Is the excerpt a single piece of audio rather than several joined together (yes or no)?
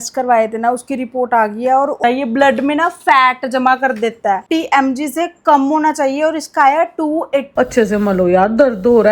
no